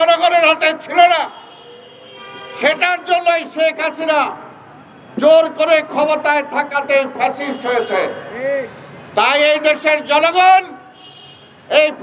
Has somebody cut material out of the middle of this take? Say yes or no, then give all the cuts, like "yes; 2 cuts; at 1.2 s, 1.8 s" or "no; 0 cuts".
no; 0 cuts